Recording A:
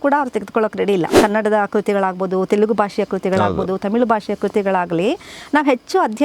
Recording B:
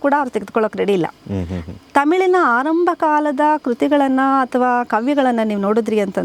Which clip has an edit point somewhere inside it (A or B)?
A